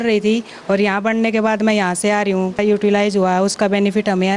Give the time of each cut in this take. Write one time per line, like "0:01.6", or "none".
0:02.6